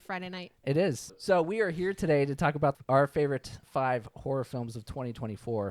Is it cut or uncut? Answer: cut